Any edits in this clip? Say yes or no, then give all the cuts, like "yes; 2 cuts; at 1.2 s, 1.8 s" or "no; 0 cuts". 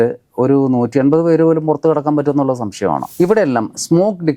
yes; 1 cut; at 3.1 s